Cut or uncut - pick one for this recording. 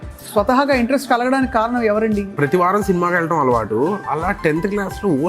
cut